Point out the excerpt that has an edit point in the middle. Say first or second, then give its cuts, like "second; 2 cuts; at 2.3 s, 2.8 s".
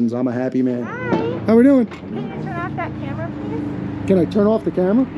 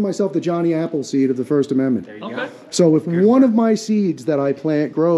first; 2 cuts; at 0.9 s, 3.8 s